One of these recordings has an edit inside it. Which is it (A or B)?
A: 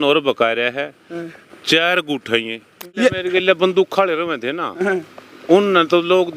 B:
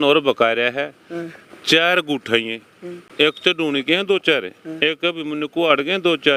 A